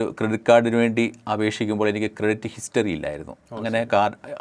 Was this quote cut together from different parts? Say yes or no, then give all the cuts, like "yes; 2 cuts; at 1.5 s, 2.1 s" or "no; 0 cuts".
no; 0 cuts